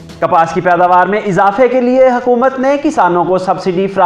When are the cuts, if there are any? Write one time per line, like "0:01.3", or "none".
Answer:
none